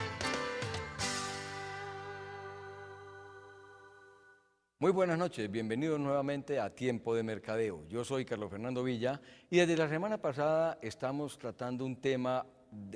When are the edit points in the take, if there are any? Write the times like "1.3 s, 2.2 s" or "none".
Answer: 3.0 s